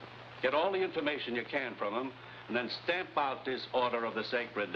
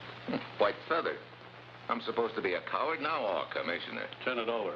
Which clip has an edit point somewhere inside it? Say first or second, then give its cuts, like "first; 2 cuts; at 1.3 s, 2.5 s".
second; 1 cut; at 2.6 s